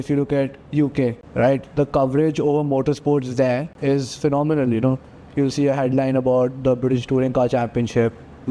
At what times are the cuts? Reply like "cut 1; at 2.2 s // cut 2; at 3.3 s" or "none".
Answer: cut 1; at 1.2 s // cut 2; at 3.7 s